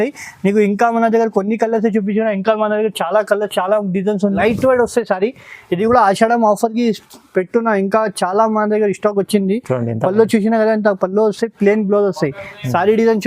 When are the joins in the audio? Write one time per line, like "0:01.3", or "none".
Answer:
0:04.4